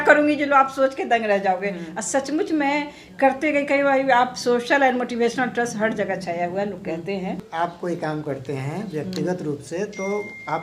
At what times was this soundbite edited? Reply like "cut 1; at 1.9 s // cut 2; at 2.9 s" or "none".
cut 1; at 7.4 s